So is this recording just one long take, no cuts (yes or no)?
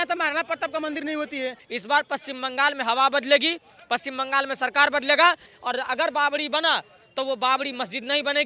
no